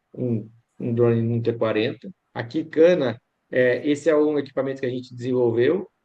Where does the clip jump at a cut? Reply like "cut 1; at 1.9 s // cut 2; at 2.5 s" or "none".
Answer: cut 1; at 2.2 s

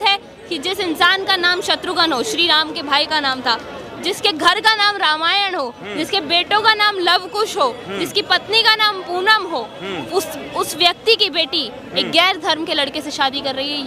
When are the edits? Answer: none

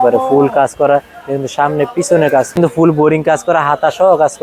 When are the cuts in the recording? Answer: cut 1; at 2.6 s

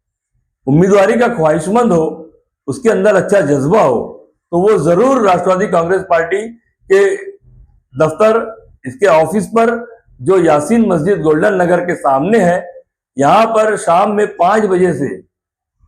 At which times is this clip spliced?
none

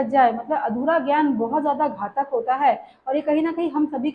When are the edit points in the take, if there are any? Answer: none

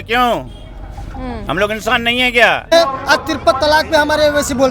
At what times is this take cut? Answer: cut 1; at 2.7 s

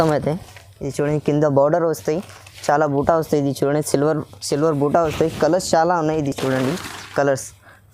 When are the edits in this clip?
none

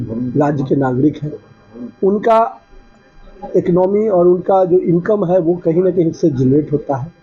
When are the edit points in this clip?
none

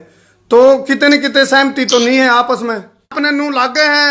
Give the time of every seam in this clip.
cut 1; at 3.1 s

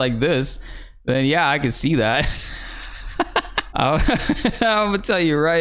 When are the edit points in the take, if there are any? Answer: none

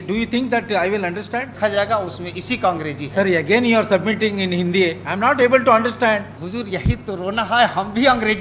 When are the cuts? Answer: cut 1; at 1.5 s // cut 2; at 6.4 s

